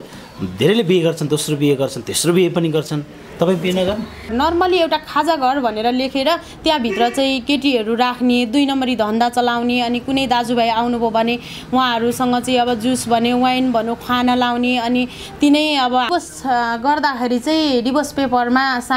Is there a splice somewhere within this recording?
yes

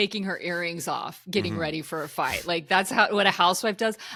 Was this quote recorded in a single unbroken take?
yes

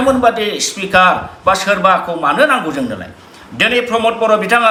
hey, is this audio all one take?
yes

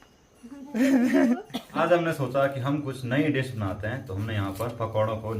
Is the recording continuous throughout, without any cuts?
no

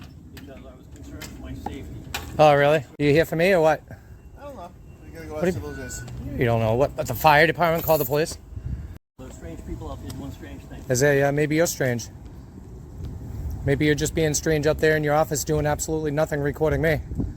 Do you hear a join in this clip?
yes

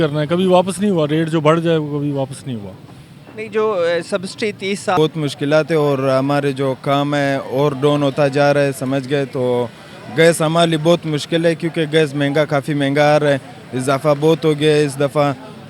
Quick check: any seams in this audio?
yes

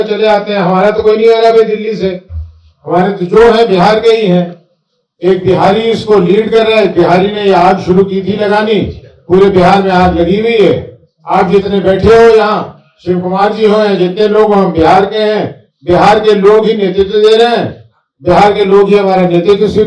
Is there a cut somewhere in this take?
no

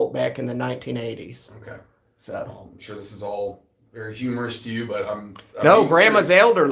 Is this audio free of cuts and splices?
yes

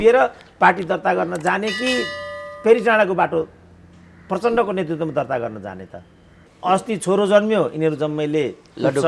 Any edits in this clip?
yes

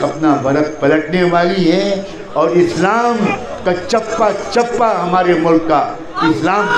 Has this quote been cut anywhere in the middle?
no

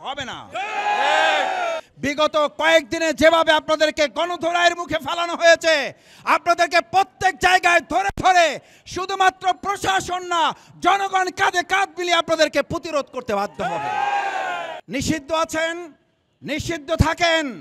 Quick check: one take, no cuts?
no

